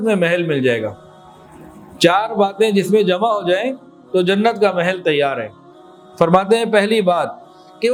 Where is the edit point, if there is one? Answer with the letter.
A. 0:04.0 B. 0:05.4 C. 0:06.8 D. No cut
D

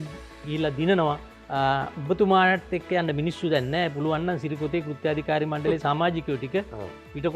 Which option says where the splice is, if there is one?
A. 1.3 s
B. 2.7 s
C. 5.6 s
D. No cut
A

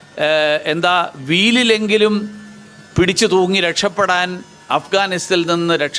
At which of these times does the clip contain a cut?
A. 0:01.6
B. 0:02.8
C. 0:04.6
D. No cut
D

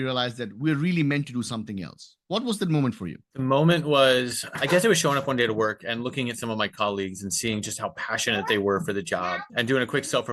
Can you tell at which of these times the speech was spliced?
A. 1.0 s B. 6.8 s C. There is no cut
C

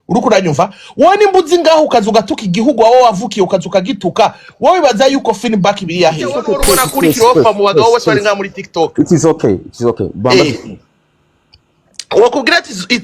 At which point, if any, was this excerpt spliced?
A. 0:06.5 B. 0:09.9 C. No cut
A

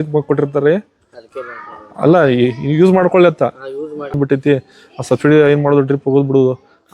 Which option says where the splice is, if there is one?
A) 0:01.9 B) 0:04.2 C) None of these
B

